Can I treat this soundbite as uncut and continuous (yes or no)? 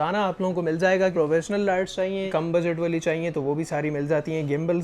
no